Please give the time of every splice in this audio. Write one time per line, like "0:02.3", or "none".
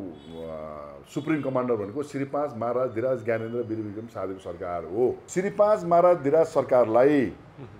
0:05.2